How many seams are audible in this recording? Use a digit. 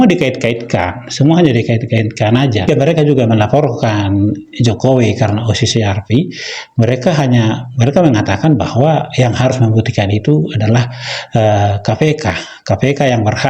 1